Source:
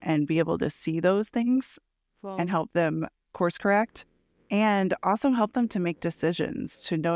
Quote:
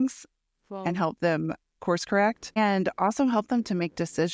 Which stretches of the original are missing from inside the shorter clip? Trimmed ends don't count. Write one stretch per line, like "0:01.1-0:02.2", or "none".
0:04.1-0:04.6